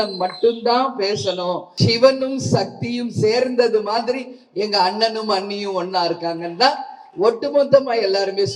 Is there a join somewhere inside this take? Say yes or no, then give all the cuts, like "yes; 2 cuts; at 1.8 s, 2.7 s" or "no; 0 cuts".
yes; 1 cut; at 1.7 s